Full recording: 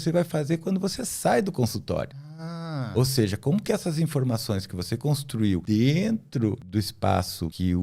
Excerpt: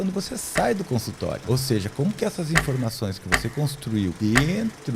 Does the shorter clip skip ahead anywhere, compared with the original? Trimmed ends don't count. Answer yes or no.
yes